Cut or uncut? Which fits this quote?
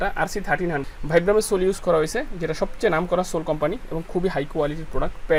uncut